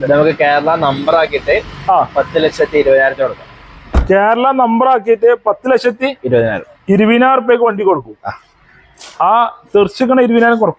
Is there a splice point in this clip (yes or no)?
no